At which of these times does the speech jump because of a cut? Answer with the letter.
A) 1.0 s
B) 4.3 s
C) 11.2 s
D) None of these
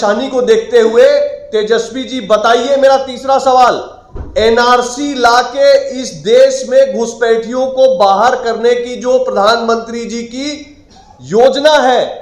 D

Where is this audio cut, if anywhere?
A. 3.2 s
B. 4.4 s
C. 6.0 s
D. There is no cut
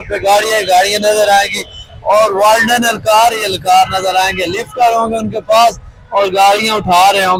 D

